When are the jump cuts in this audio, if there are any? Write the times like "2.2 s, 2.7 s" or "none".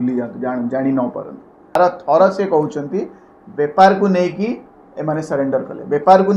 1.8 s